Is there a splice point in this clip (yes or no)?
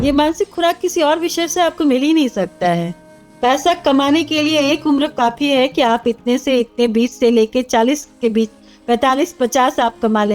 no